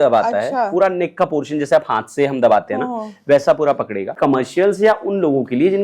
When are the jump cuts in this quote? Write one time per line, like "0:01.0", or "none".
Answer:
0:04.2